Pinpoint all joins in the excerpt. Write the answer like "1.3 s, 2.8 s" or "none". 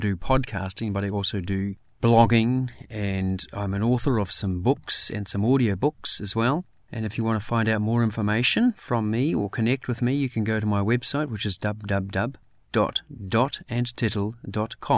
none